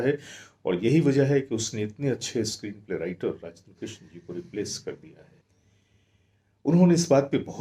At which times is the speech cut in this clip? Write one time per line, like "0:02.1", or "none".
0:05.4